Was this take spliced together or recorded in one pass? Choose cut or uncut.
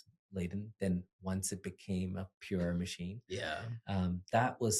uncut